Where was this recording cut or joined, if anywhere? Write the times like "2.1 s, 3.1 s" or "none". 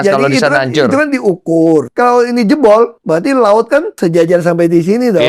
1.9 s, 3.0 s, 3.9 s